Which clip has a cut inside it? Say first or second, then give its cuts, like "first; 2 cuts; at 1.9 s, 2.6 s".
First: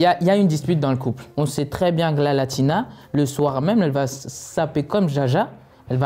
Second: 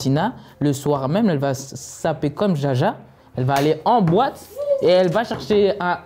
first; 1 cut; at 1.2 s